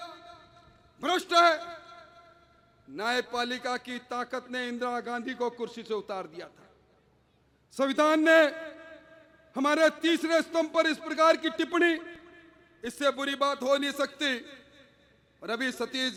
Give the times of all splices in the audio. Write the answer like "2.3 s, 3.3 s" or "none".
none